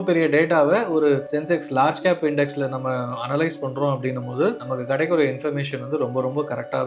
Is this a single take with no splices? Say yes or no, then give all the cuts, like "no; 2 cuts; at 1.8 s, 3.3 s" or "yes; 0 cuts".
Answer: yes; 0 cuts